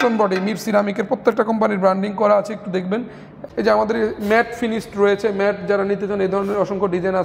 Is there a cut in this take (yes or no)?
yes